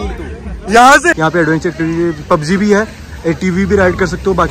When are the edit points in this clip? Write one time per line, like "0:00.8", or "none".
0:01.1